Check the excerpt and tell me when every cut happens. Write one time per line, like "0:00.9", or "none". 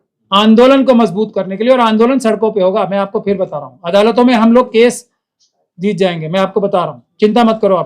none

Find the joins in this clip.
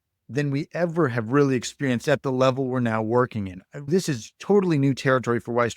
0:03.9

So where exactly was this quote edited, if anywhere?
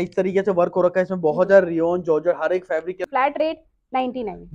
0:03.0

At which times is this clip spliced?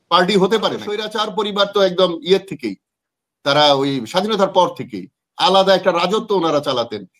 0:01.2

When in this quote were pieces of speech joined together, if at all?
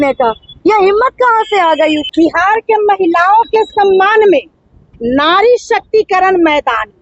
0:02.1

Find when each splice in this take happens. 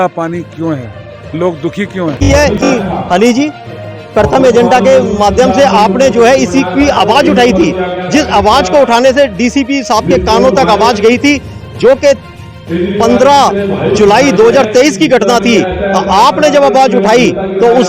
0:02.2

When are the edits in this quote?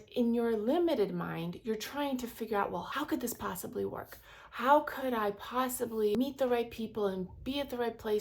0:02.9
0:06.1

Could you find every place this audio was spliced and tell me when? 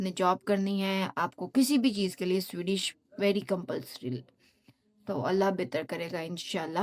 none

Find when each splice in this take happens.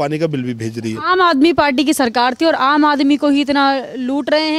none

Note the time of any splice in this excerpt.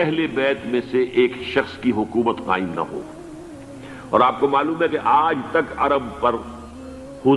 none

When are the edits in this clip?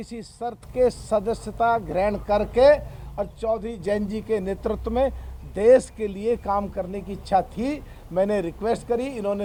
none

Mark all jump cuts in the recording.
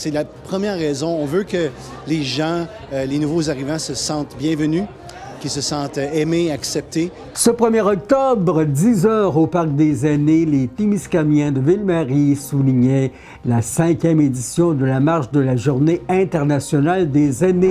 0:07.3

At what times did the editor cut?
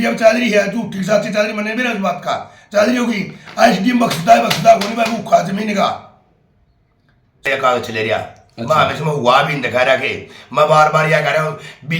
0:07.5

